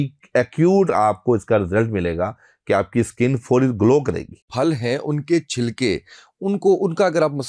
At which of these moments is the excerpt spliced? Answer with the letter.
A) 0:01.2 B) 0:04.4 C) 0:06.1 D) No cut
B